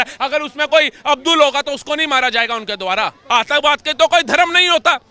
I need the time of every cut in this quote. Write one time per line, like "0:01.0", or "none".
0:03.2